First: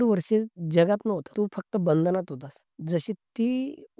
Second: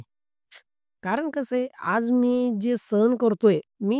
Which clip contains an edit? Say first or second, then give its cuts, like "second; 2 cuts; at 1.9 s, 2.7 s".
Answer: first; 1 cut; at 1.3 s